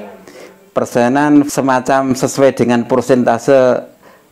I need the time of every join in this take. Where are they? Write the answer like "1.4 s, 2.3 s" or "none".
1.5 s